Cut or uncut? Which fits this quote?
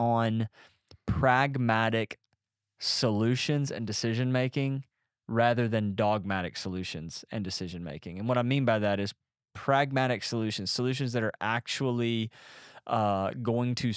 uncut